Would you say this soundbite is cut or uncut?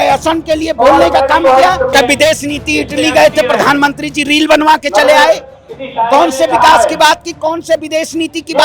cut